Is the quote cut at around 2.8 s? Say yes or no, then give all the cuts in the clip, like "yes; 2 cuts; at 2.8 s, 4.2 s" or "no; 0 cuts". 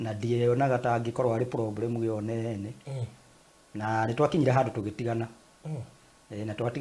no; 0 cuts